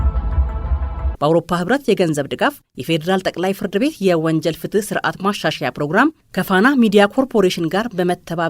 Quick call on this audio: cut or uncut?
cut